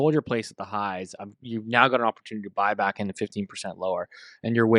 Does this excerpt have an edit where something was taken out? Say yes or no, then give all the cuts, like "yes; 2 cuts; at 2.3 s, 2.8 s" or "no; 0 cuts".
no; 0 cuts